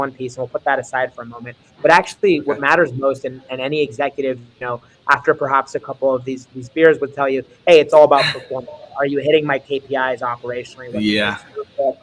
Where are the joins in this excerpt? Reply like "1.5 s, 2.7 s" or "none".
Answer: none